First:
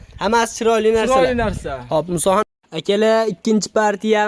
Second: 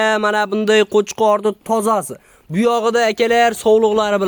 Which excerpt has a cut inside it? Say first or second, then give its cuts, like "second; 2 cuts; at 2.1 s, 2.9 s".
first; 1 cut; at 2.4 s